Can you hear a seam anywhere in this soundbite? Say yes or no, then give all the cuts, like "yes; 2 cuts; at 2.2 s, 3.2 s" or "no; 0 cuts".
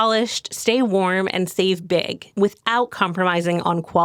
no; 0 cuts